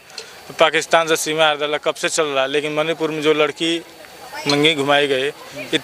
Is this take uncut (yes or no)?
yes